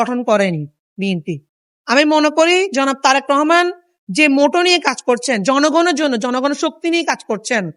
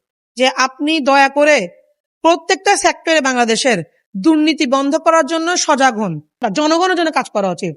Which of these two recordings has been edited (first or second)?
second